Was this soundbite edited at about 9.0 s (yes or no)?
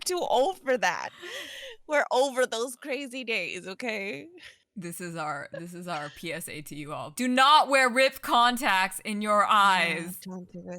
no